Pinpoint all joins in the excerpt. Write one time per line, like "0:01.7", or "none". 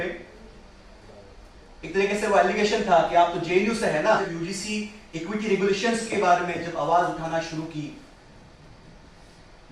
0:04.2